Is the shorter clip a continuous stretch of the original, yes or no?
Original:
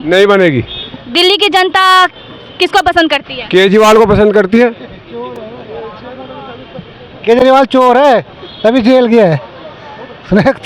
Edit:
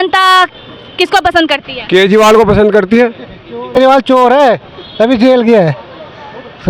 no